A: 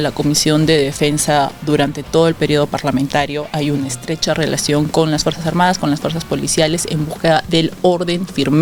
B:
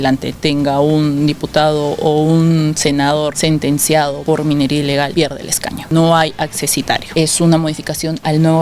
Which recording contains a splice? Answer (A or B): B